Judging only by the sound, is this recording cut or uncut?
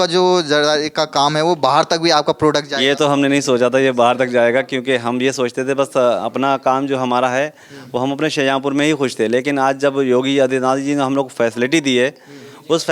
uncut